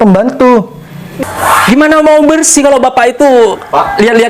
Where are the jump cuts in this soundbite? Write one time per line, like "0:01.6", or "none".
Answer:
0:01.1